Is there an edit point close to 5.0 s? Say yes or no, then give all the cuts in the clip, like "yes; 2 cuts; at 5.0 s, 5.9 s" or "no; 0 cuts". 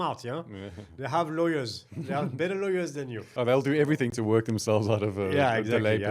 no; 1 cut; at 3.2 s